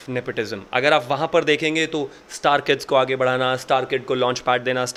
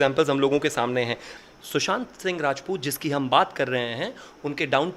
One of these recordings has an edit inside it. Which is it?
second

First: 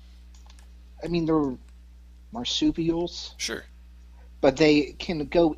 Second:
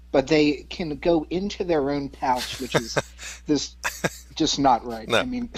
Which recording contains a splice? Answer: first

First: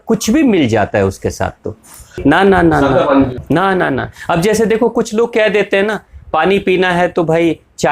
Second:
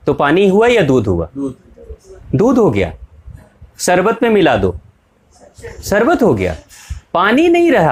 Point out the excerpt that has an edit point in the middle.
first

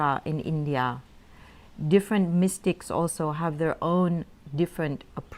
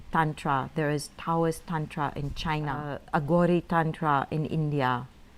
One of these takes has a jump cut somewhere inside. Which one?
second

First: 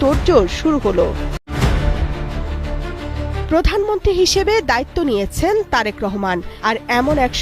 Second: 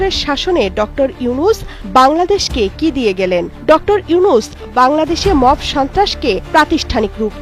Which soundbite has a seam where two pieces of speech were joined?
first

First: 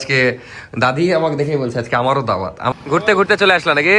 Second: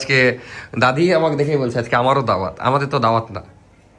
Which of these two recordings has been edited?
first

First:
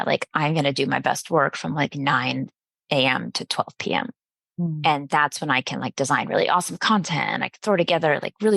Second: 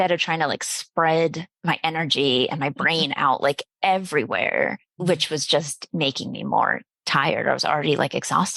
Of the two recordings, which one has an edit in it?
second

